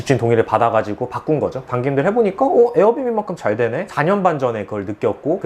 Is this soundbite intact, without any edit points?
yes; 0 cuts

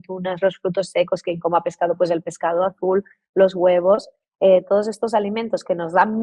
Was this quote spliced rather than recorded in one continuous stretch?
no; 0 cuts

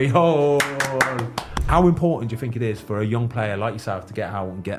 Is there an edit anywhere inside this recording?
yes; 1 cut; at 1.6 s

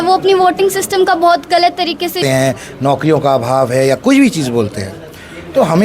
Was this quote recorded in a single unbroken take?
no; 1 cut; at 2.2 s

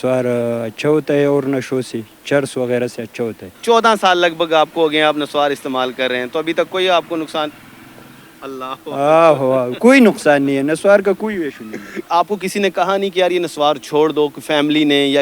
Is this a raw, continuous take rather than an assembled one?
no; 2 cuts; at 3.5 s, 12.1 s

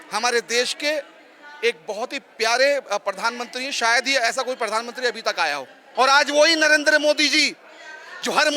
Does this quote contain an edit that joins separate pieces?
yes; 1 cut; at 5.8 s

